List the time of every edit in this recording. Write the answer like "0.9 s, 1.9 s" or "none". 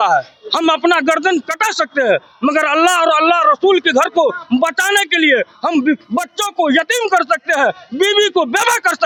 none